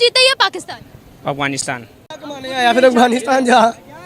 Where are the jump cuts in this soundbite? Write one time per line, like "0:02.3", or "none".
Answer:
0:02.1